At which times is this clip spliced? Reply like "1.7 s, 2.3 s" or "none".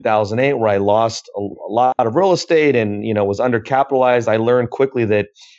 none